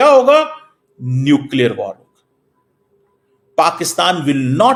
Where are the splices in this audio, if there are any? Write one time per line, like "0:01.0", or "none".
none